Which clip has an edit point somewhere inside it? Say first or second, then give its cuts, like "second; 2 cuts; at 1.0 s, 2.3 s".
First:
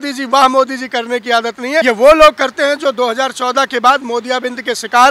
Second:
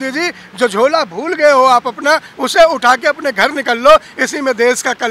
first; 1 cut; at 1.8 s